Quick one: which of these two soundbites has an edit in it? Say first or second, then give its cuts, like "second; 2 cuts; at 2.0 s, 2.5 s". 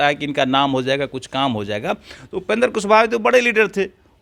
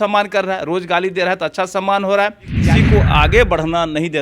second; 1 cut; at 2.6 s